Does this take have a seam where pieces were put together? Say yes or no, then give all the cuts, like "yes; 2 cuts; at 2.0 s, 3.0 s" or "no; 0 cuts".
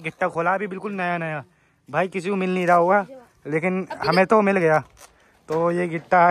no; 0 cuts